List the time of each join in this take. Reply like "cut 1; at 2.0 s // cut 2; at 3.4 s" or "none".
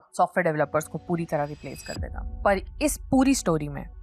none